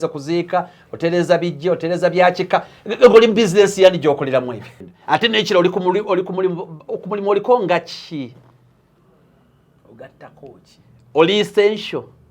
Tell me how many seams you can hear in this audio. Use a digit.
1